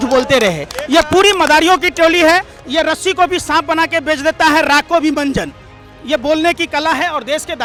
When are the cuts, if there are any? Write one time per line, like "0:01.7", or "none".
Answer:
none